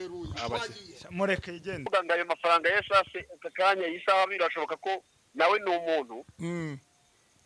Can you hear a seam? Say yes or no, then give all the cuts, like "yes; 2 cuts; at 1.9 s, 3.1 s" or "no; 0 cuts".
yes; 1 cut; at 1.8 s